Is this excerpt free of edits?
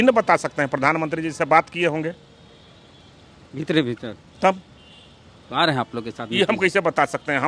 yes; 0 cuts

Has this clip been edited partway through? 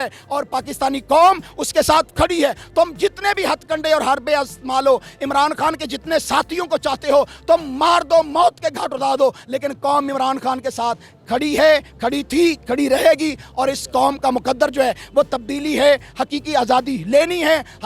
no; 0 cuts

